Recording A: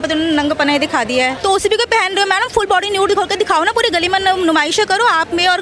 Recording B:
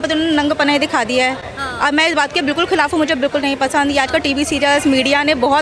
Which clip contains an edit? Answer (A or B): A